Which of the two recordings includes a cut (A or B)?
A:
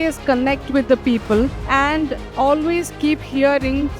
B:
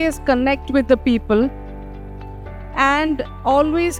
A